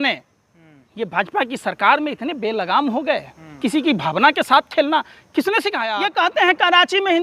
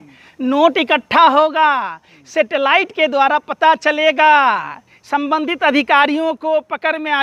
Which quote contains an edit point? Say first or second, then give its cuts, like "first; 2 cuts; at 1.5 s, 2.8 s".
first; 1 cut; at 5.8 s